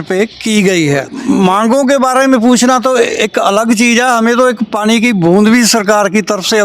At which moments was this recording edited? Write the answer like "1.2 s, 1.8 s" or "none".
1.1 s